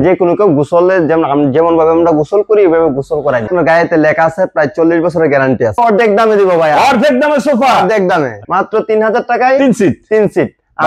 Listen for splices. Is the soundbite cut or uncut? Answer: cut